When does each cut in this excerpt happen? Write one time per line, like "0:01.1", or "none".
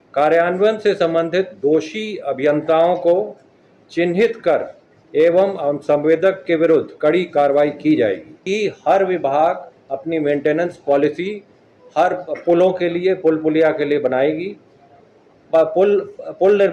0:08.3
0:09.8